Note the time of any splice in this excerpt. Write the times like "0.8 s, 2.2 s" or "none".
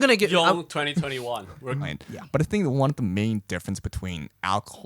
1.9 s